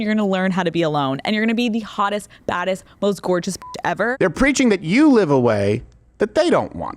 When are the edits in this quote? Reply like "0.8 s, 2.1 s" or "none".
4.1 s